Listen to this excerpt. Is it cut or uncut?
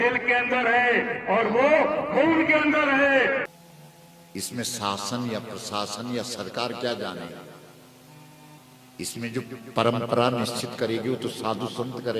cut